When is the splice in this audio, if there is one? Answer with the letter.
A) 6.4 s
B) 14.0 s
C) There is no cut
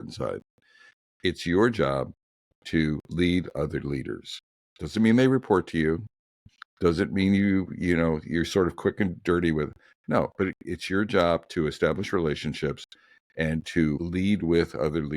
B